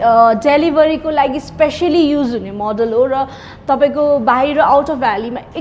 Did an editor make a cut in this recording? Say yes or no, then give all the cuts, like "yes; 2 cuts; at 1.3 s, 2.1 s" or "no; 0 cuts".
no; 0 cuts